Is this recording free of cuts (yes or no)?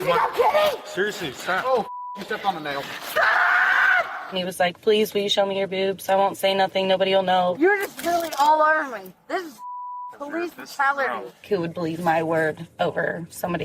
no